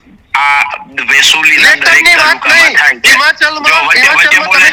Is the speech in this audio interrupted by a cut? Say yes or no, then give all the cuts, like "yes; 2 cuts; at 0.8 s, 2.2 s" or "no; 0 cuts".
no; 0 cuts